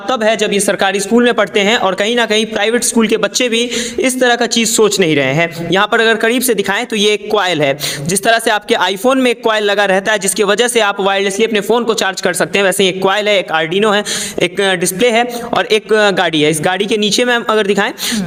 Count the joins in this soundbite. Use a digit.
0